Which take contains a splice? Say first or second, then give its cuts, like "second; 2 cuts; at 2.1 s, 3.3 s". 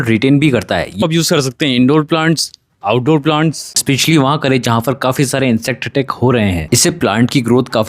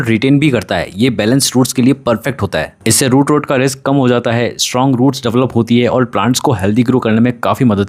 first; 3 cuts; at 1.0 s, 3.8 s, 6.6 s